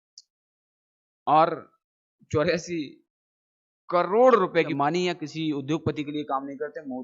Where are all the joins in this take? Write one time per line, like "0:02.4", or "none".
0:04.7